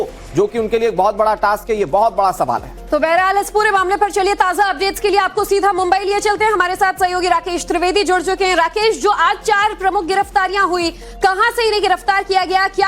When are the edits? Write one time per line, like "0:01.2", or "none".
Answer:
0:10.1